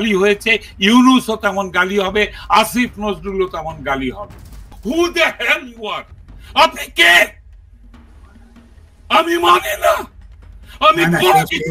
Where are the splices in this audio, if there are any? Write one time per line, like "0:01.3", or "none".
0:04.7